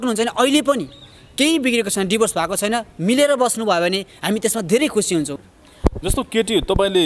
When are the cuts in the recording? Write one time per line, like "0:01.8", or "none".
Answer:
0:05.3